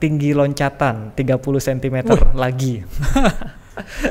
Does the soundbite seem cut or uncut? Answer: uncut